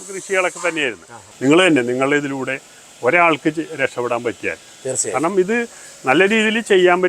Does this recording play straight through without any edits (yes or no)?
no